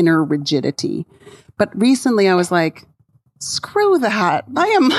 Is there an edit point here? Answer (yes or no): no